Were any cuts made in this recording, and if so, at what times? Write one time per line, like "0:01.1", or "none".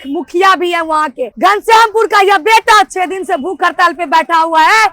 0:01.3